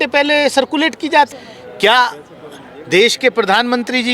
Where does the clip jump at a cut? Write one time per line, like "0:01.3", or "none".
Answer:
0:01.3